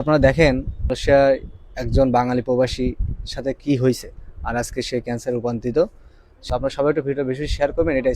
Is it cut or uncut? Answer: cut